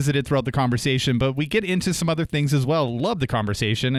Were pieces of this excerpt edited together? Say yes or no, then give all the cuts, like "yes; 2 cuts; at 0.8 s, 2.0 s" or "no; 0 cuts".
no; 0 cuts